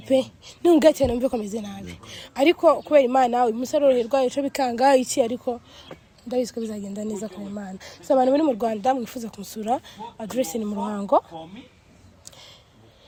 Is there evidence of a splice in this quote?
no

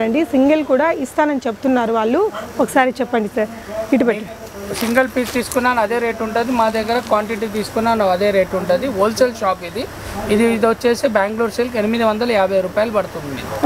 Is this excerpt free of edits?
yes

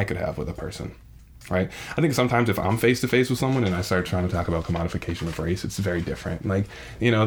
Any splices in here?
no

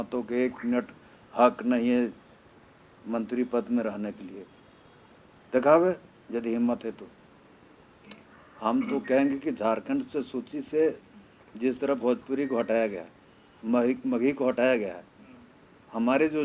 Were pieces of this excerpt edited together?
yes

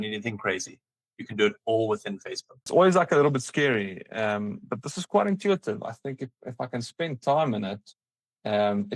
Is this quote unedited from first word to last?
no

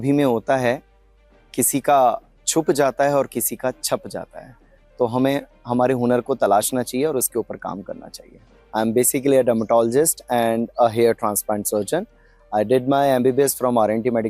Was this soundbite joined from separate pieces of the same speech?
yes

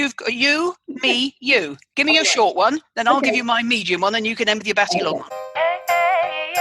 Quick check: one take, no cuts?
no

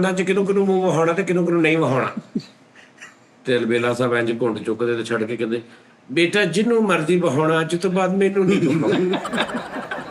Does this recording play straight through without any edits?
yes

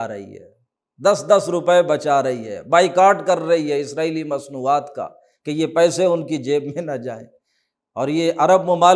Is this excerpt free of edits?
yes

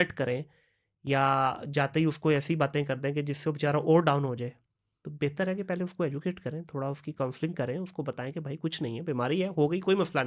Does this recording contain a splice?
no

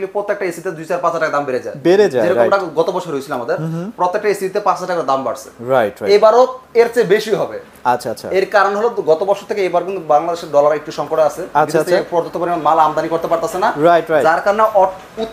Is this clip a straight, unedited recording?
yes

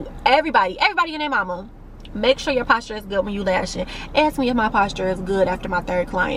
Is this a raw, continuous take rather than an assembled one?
yes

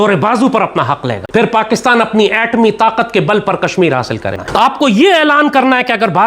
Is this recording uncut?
no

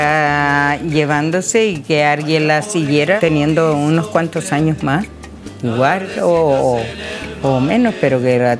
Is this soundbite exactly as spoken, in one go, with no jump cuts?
no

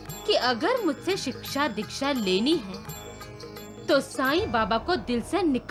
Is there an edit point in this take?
no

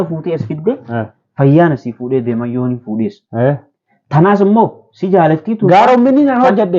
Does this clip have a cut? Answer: no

